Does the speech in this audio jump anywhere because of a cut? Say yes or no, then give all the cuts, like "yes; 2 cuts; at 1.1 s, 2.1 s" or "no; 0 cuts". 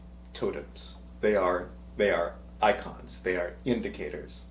no; 0 cuts